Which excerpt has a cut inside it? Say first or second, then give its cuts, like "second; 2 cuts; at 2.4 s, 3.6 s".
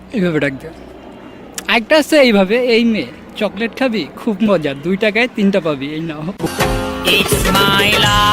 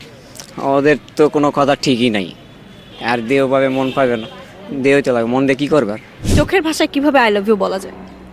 second; 2 cuts; at 2.4 s, 6.1 s